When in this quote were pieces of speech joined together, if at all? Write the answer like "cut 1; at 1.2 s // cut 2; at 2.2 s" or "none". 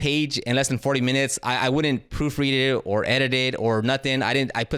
none